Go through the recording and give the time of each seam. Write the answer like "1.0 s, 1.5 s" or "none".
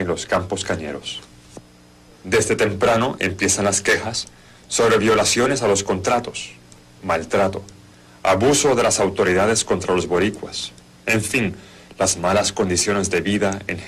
8.6 s